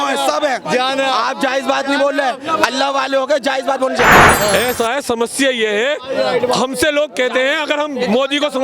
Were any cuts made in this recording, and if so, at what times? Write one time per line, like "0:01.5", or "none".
0:04.3